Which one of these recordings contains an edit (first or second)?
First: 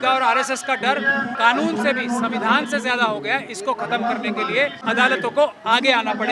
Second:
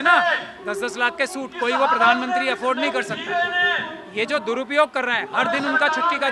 first